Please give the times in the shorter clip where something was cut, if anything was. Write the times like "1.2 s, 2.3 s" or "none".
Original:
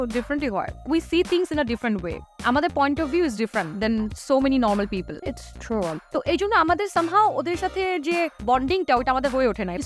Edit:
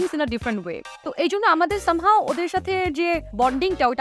0.9 s